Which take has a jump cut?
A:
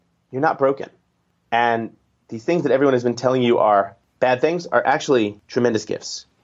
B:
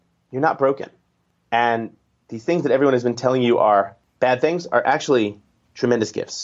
A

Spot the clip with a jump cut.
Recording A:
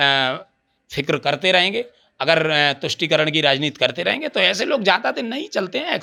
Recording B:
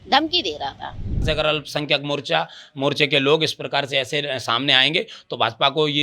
B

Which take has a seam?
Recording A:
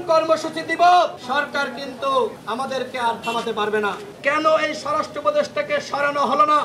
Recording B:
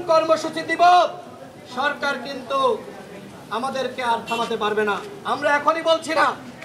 A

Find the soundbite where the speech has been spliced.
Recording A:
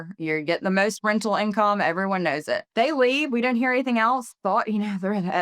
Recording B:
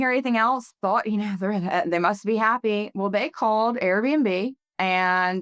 A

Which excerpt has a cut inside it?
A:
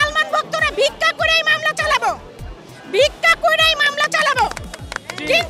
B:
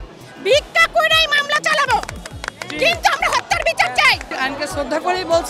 B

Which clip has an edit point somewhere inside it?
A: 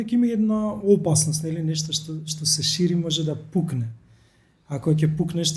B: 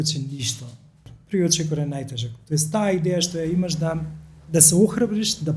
B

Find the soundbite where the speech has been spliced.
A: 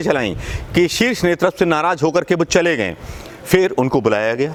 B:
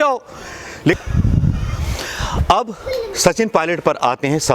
B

